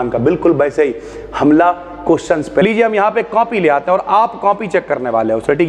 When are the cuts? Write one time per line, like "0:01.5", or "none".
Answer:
0:02.6

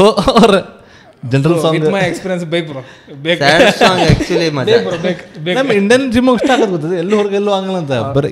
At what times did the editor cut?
none

